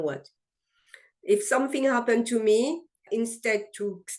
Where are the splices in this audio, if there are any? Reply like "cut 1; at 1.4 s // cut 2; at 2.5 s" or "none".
cut 1; at 3.0 s